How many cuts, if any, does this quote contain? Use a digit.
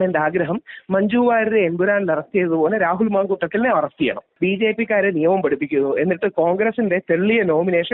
1